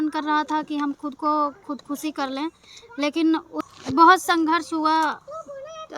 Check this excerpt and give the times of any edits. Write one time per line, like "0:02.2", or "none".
0:03.6